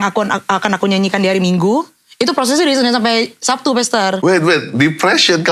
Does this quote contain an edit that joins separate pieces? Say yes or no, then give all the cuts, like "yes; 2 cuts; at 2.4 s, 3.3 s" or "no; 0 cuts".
no; 0 cuts